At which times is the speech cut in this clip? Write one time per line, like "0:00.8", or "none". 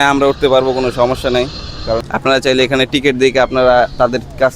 0:02.0